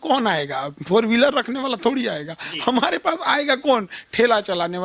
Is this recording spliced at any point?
no; 0 cuts

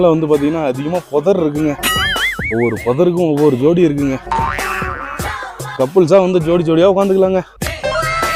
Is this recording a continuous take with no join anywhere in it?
yes; 0 cuts

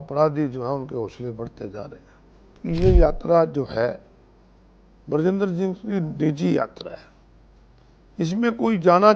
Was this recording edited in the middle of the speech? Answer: yes; 1 cut; at 2.6 s

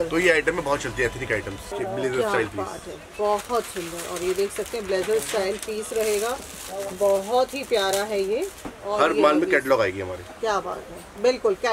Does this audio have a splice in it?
yes; 2 cuts; at 1.7 s, 8.7 s

